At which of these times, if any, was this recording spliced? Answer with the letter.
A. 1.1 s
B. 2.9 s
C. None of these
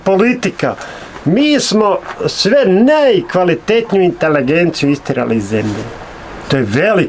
C